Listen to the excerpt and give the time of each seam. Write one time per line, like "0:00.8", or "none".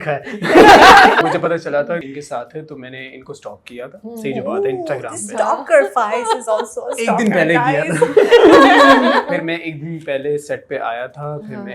0:01.2
0:02.0
0:09.3